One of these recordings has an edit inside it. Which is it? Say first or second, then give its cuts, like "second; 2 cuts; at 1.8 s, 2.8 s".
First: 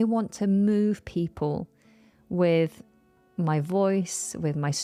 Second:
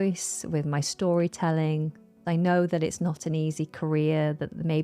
second; 1 cut; at 2.2 s